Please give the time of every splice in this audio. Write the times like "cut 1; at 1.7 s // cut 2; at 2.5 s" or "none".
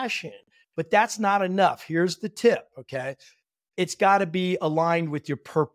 none